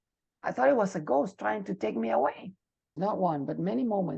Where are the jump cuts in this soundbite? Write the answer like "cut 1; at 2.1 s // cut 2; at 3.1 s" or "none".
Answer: cut 1; at 3.0 s